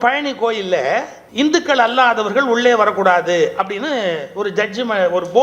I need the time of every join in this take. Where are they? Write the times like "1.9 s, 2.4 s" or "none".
1.2 s